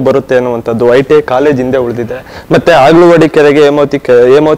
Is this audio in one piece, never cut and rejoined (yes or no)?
yes